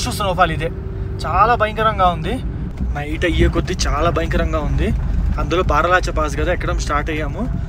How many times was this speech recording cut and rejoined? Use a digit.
1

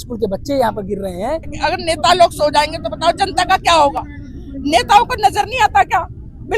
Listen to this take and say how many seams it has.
1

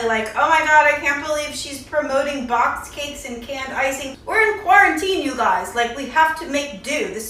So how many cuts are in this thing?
0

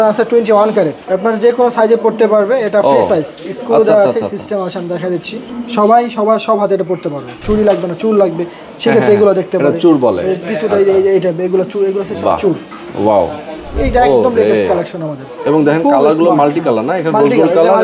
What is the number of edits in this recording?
4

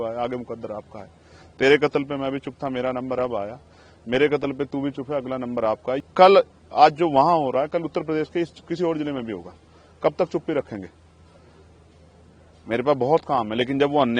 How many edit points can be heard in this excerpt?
1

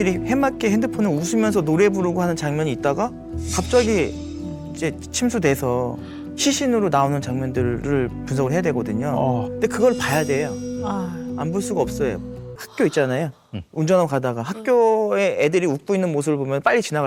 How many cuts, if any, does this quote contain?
1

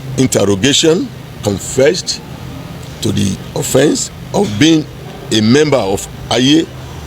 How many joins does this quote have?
1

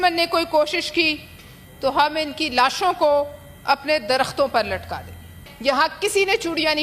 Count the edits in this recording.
1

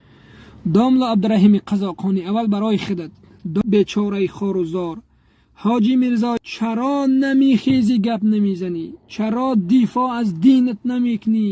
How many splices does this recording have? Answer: 2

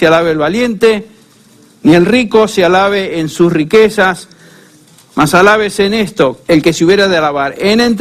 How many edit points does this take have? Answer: 1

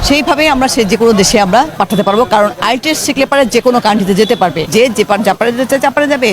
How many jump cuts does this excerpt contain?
2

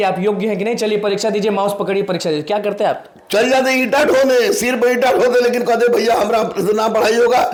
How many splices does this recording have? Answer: 0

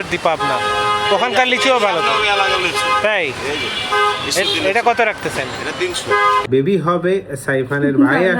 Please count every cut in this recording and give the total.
1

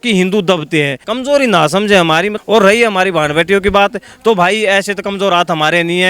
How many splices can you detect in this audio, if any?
2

